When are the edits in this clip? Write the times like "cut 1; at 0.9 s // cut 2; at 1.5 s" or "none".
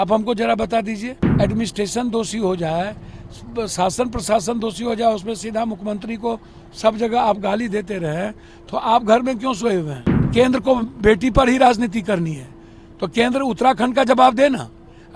cut 1; at 1.2 s // cut 2; at 10.3 s